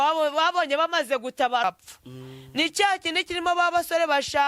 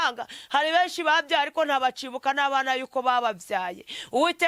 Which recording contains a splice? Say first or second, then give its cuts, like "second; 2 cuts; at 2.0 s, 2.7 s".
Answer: first; 1 cut; at 1.6 s